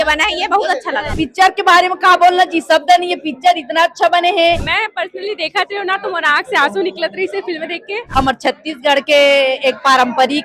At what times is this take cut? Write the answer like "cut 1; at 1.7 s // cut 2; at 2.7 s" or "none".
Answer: cut 1; at 1.1 s // cut 2; at 4.7 s // cut 3; at 8.0 s